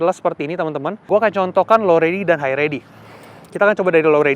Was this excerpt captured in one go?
no; 1 cut; at 1.1 s

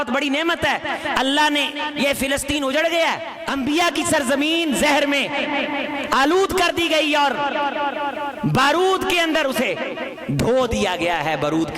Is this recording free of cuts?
no; 2 cuts; at 3.3 s, 10.1 s

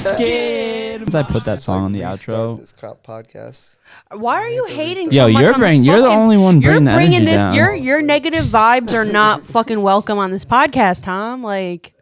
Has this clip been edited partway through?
yes; 1 cut; at 1.1 s

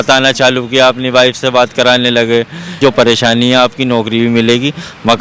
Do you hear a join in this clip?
yes; 1 cut; at 2.8 s

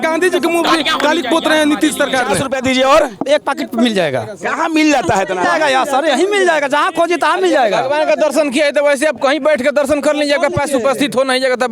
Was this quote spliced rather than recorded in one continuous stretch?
yes; 1 cut; at 2.4 s

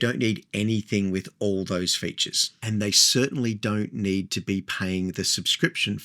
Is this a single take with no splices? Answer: yes; 0 cuts

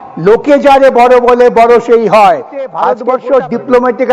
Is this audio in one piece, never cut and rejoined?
no; 1 cut; at 2.9 s

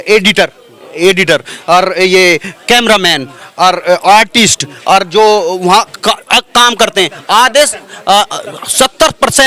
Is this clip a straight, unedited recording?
yes; 0 cuts

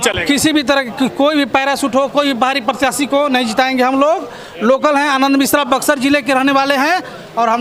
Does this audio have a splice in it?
no; 0 cuts

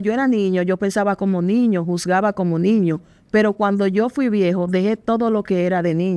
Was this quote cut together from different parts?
no; 0 cuts

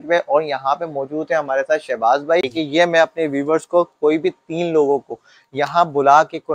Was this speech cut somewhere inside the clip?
yes; 1 cut; at 2.5 s

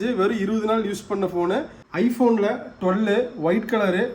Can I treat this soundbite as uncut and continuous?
no; 1 cut; at 1.8 s

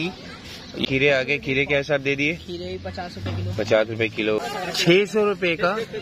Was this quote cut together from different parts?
yes; 2 cuts; at 0.9 s, 4.5 s

